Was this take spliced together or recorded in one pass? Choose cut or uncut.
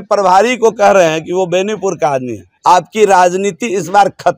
cut